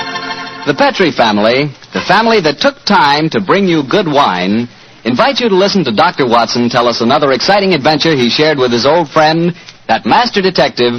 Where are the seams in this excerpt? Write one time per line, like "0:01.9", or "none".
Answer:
0:09.3